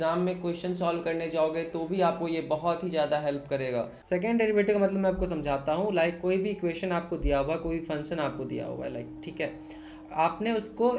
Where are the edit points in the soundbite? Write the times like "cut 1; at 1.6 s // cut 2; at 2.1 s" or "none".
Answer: cut 1; at 4.0 s